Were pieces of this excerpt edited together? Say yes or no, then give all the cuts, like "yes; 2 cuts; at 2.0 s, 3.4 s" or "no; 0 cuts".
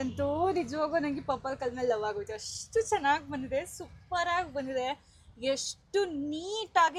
no; 0 cuts